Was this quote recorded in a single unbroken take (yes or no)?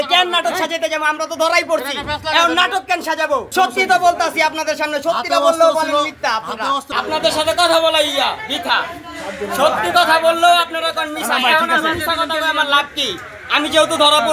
no